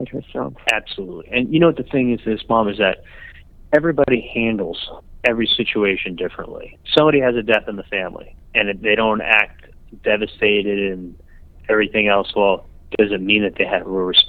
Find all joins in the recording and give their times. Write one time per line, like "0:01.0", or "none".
none